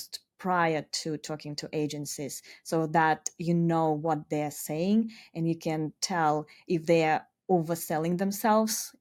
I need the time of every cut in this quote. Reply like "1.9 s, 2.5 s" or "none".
none